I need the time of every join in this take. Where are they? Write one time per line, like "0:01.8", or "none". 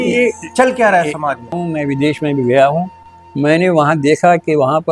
0:01.6